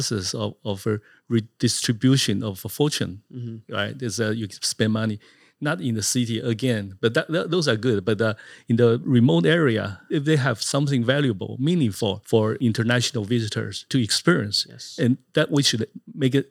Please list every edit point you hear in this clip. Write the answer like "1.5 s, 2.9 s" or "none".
10.1 s, 12.5 s, 13.8 s